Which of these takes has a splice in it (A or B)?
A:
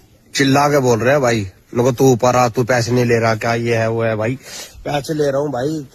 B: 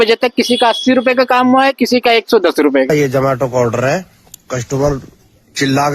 B